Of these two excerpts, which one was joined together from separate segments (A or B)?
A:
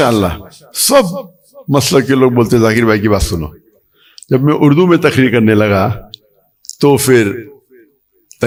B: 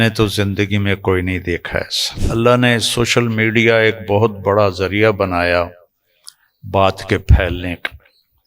B